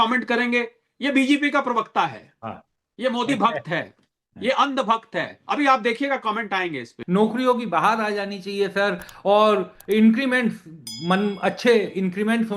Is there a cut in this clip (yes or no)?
yes